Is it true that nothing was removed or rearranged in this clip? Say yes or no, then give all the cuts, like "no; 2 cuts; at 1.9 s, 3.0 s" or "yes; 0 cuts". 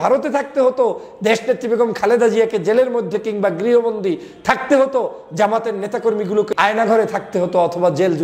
no; 1 cut; at 6.5 s